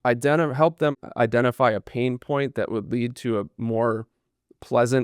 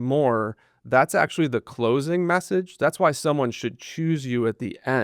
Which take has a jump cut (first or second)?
first